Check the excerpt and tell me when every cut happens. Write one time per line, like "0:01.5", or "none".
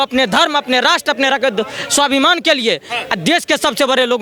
none